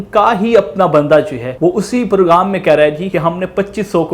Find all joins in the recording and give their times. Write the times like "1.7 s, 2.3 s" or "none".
1.4 s, 3.0 s